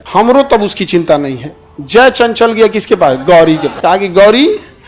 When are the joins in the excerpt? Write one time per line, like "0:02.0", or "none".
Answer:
0:03.7